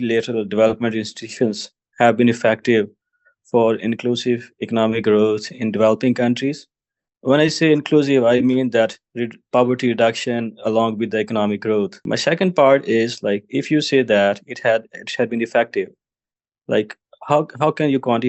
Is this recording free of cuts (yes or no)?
no